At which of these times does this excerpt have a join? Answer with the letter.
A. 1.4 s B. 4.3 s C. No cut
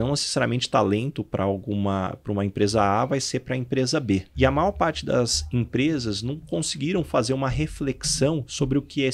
B